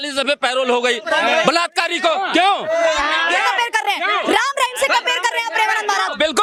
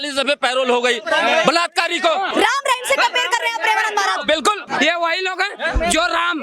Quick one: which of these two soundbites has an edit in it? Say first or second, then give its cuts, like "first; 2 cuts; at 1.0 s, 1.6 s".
second; 2 cuts; at 2.3 s, 4.6 s